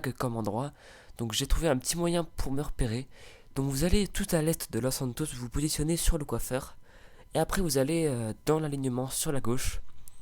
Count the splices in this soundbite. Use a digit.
1